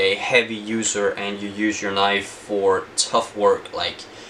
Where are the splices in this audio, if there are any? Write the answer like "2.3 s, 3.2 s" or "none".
none